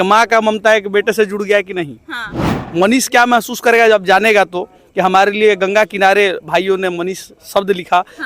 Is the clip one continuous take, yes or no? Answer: no